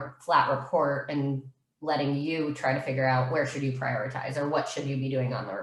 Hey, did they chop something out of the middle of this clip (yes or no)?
no